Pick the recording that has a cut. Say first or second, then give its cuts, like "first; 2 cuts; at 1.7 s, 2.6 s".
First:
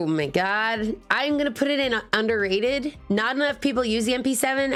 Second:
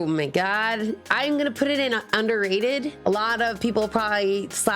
second; 1 cut; at 2.9 s